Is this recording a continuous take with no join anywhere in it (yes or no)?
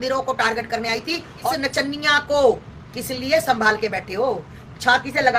no